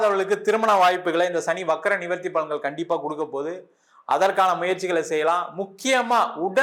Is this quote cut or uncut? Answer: uncut